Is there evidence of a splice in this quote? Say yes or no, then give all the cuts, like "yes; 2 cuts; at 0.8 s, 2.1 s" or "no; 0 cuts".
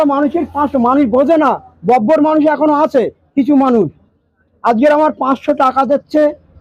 no; 0 cuts